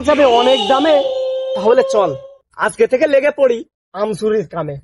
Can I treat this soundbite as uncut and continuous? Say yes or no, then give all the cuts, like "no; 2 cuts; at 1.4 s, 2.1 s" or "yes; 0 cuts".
yes; 0 cuts